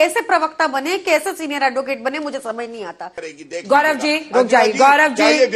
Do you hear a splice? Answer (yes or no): yes